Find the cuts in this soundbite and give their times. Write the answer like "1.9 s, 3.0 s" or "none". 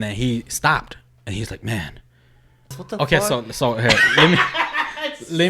2.8 s